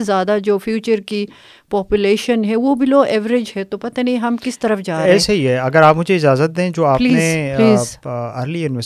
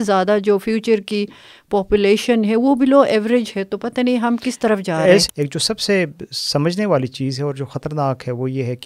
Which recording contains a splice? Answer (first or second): second